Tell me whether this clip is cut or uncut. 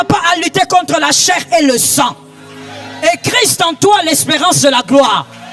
uncut